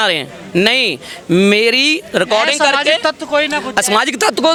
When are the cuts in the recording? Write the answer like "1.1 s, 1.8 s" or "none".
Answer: none

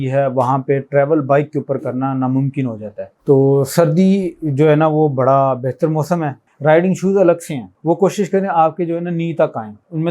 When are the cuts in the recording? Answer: 6.4 s

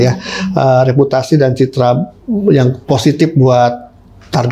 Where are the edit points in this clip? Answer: none

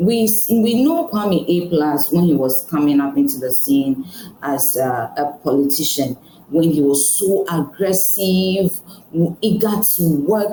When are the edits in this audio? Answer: none

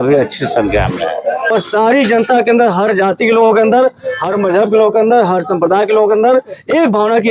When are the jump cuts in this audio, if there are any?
1.5 s

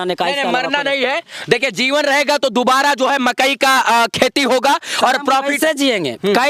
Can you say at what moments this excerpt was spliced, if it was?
none

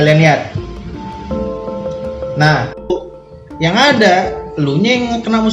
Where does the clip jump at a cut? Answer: 3.0 s

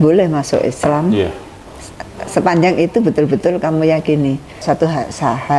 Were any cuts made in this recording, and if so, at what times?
4.6 s

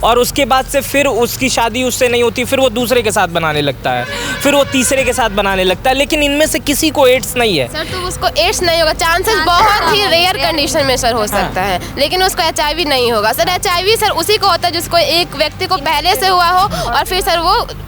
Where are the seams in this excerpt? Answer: none

